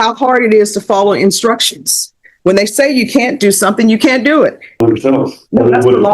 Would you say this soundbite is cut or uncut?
cut